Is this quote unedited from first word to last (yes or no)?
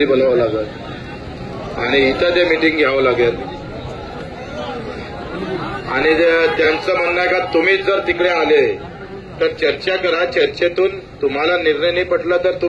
yes